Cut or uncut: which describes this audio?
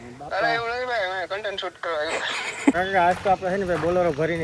cut